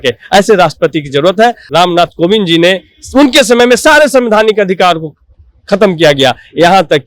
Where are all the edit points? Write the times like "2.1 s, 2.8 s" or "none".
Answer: 1.7 s